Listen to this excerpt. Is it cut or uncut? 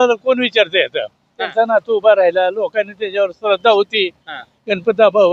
cut